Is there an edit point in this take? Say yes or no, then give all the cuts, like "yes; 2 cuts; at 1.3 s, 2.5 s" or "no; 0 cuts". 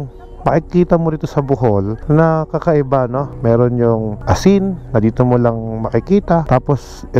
no; 0 cuts